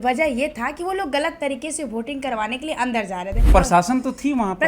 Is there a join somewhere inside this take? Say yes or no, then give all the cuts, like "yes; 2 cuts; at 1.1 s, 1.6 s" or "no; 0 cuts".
yes; 1 cut; at 3.5 s